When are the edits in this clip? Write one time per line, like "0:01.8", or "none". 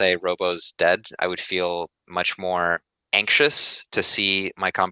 0:03.0

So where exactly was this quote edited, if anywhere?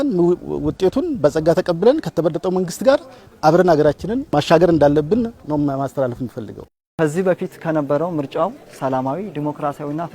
0:06.8

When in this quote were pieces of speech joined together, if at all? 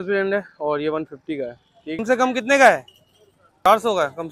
0:02.0
0:03.6

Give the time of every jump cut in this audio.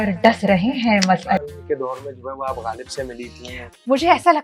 0:01.4

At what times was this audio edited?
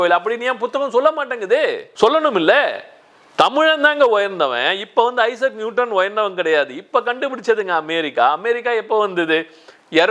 none

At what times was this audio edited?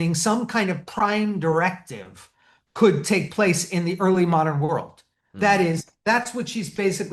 none

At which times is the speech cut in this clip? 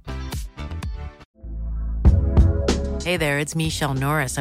0:01.3

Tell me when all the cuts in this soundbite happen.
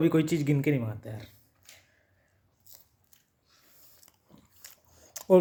none

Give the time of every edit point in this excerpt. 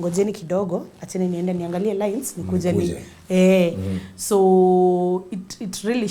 none

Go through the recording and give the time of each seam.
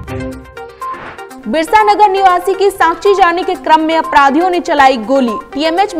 0:01.3

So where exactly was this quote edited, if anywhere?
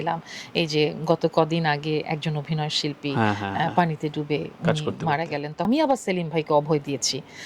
0:05.7

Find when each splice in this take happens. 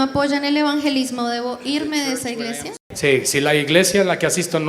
0:02.9

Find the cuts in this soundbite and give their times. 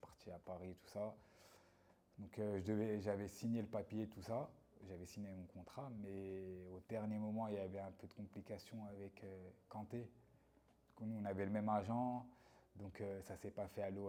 none

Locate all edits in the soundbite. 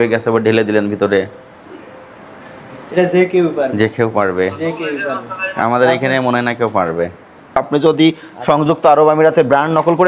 0:07.6

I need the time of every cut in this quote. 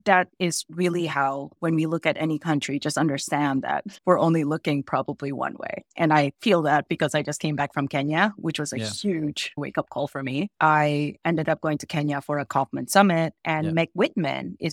none

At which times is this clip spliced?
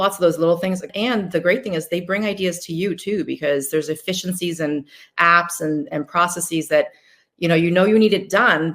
0:00.9

